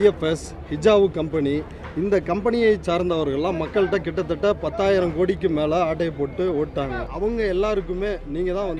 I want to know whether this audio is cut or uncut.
cut